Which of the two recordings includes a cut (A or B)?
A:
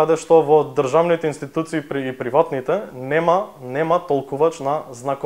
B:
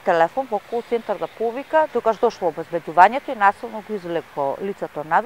B